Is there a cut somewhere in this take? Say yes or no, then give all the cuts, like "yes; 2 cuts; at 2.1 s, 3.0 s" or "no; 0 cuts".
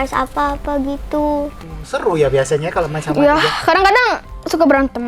yes; 1 cut; at 1.7 s